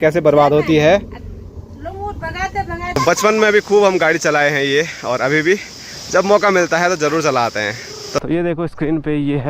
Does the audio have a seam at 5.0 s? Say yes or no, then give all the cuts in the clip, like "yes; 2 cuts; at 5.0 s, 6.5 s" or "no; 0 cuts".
no; 2 cuts; at 3.0 s, 8.2 s